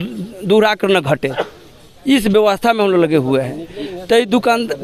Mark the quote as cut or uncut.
uncut